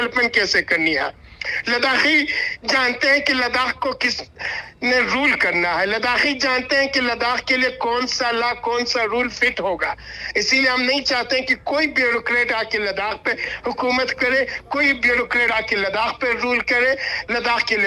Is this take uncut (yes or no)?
yes